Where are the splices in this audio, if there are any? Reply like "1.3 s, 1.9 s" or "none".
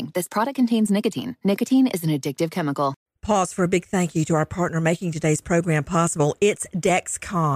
3.0 s